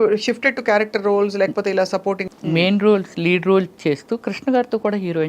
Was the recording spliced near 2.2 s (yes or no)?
yes